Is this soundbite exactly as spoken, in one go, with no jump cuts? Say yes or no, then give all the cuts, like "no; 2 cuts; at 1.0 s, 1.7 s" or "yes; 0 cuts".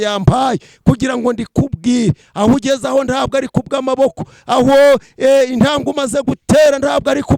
yes; 0 cuts